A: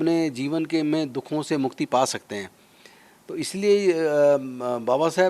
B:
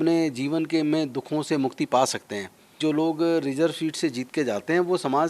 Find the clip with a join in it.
B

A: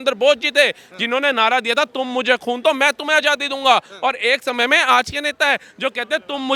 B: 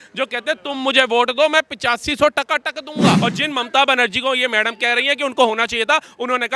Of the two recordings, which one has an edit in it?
B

